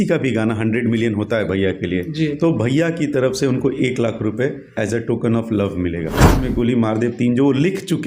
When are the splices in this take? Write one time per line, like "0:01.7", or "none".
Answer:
0:06.4